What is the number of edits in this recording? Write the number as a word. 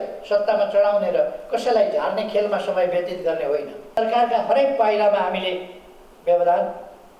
one